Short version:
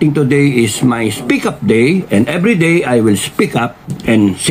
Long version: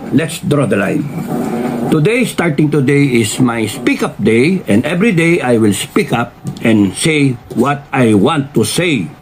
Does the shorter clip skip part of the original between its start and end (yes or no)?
no